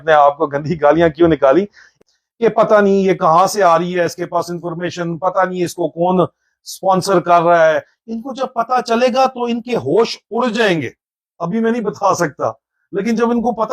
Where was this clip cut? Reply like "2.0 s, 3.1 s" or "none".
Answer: 1.9 s